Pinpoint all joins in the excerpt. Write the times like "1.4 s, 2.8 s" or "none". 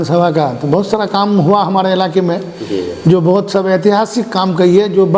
none